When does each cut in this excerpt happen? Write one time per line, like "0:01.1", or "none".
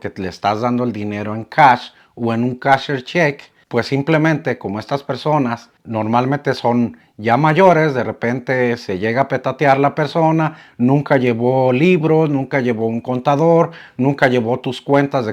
none